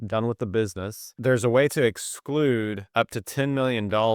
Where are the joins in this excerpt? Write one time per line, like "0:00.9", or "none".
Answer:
0:01.2
0:02.8